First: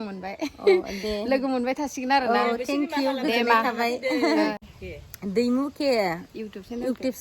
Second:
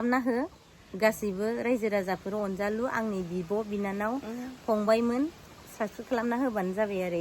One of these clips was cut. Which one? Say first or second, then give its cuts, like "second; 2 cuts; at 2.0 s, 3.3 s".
first; 1 cut; at 4.6 s